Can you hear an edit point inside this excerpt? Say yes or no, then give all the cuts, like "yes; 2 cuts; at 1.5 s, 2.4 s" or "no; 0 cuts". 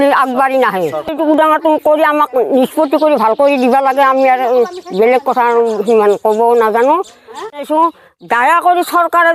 no; 0 cuts